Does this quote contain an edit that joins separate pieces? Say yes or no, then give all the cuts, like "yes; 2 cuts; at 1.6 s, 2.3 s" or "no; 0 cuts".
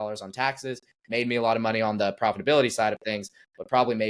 no; 0 cuts